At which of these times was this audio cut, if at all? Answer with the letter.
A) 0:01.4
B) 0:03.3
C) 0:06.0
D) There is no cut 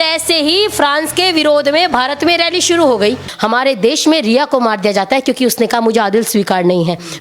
B